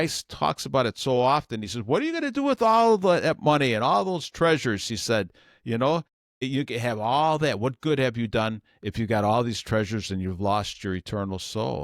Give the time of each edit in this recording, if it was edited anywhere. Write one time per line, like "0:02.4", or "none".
none